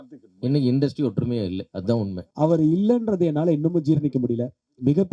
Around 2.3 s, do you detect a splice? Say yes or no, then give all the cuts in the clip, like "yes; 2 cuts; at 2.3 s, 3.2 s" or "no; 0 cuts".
yes; 1 cut; at 2.3 s